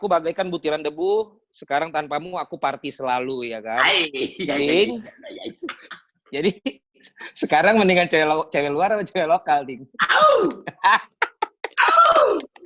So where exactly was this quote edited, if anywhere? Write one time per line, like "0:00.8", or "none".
none